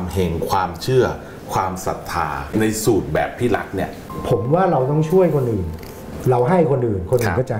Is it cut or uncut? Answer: cut